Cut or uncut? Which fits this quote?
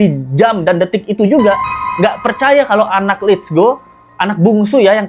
uncut